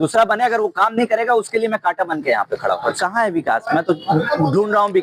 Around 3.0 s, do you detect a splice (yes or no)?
yes